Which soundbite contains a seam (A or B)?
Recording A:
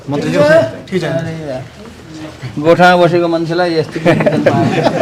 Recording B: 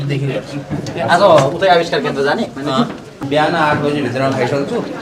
B